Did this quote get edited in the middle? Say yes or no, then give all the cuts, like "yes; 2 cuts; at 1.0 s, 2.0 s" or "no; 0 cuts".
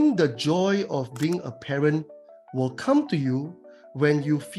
no; 0 cuts